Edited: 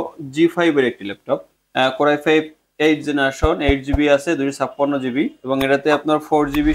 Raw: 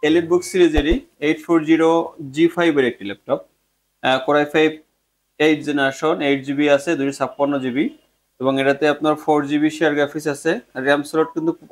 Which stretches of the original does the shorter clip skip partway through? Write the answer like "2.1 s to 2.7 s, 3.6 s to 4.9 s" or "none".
3.6 s to 3.9 s, 4.9 s to 5.2 s, 8.0 s to 8.3 s